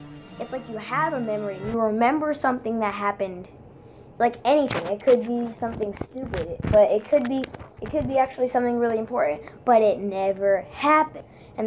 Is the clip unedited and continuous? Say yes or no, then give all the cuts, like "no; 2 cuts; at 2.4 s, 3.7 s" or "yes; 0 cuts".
no; 1 cut; at 7.2 s